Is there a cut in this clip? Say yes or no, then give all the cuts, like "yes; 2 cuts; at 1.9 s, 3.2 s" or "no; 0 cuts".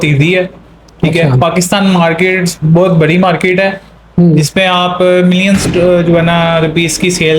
no; 0 cuts